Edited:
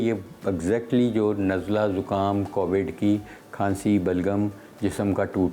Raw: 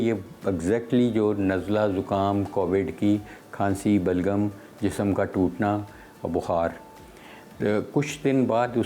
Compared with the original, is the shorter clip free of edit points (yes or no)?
yes